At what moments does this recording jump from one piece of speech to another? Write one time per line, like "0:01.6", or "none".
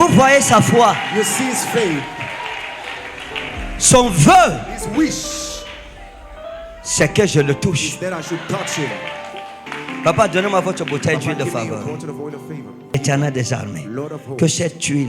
0:12.9